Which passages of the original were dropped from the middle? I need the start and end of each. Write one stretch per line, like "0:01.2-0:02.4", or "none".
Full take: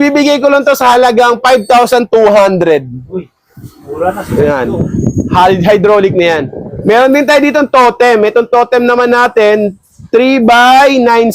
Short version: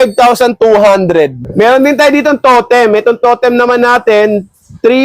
0:02.9-0:06.7